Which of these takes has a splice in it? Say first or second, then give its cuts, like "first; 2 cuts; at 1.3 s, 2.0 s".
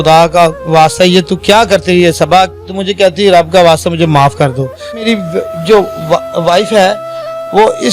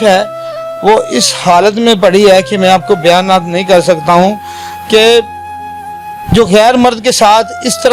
first; 1 cut; at 5.0 s